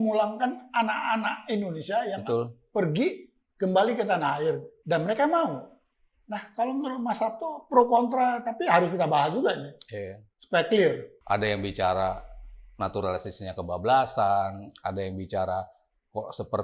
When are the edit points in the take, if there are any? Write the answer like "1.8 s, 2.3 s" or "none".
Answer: 4.7 s, 11.1 s